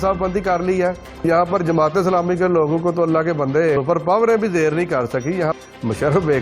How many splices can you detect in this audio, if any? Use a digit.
3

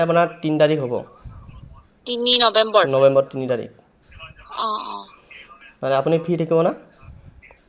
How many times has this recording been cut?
0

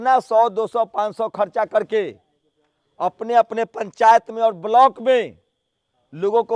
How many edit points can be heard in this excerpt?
0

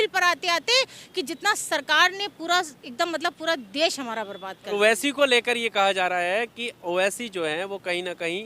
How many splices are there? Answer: 1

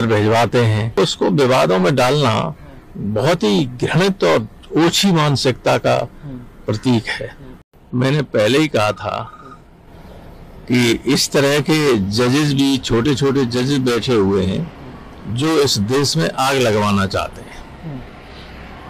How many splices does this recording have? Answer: 2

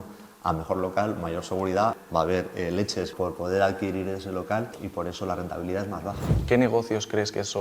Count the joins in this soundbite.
4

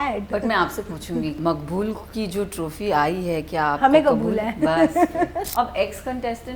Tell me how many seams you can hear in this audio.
2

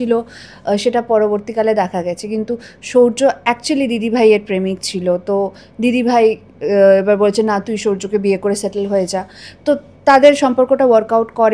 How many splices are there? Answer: 0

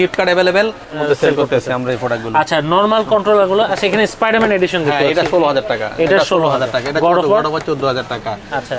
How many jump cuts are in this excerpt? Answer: 1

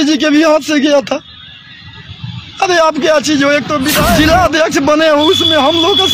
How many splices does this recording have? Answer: 1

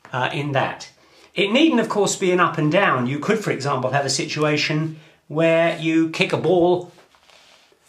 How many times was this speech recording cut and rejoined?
1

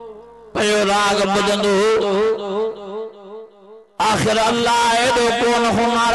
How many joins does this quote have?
0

